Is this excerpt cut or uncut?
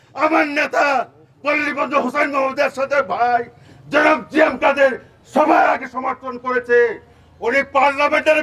uncut